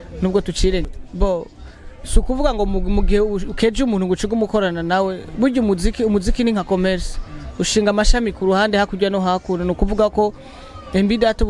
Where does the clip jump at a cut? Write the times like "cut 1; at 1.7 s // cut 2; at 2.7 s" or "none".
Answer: cut 1; at 1.0 s